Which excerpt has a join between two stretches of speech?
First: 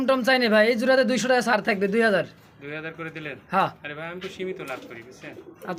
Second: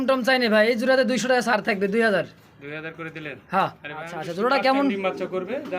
second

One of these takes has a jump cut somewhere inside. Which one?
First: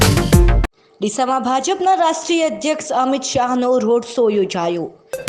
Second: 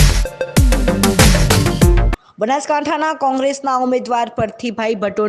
second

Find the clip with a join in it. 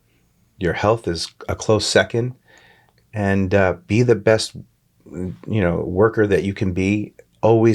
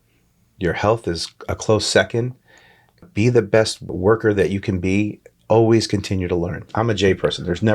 second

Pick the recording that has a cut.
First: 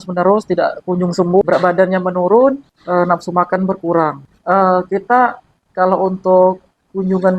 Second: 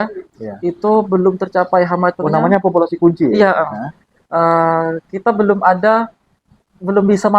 first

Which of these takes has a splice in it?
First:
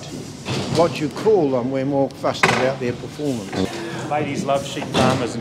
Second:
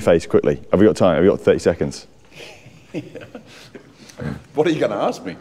first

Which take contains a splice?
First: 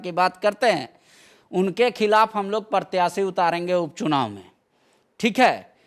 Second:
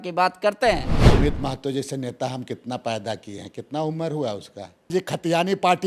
second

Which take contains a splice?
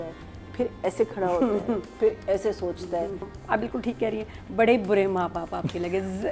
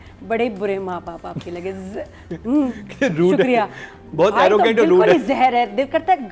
first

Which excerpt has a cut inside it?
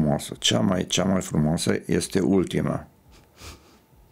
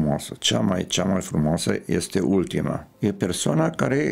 second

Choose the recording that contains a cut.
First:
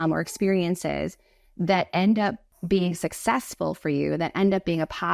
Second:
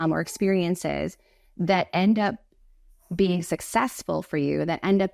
first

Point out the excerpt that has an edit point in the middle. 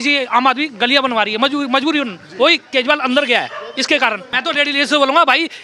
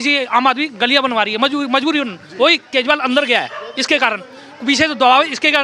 first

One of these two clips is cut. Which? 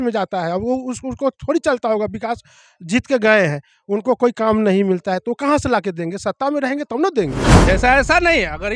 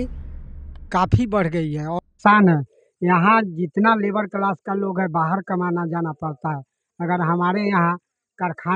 first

